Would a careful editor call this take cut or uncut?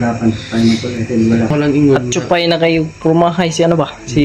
cut